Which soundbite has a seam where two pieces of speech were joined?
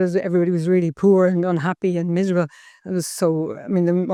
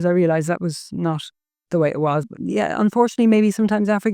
second; 1 cut; at 2.3 s

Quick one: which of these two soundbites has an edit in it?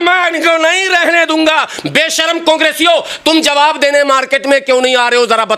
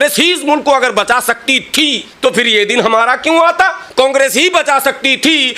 second; 2 cuts; at 2.1 s, 3.8 s

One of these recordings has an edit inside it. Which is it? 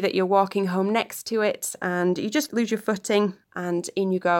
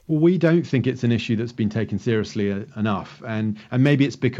first; 2 cuts; at 2.5 s, 3.5 s

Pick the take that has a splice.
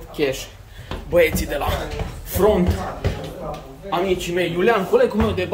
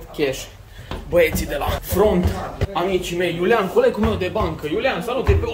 second; 2 cuts; at 1.8 s, 2.6 s

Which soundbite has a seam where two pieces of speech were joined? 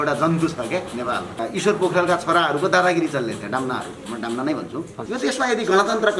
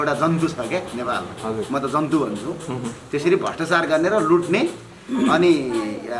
first; 2 cuts; at 1.3 s, 5.0 s

